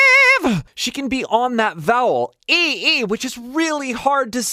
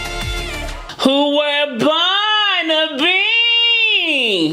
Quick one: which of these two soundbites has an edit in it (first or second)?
second